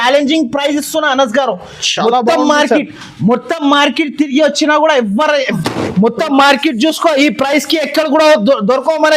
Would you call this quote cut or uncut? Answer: cut